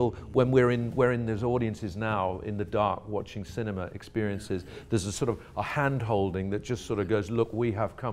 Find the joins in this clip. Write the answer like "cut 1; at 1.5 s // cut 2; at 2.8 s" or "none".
none